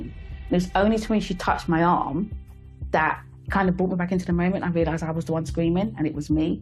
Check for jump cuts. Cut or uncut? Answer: uncut